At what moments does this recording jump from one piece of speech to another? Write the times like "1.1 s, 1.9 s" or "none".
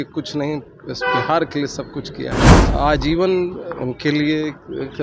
2.6 s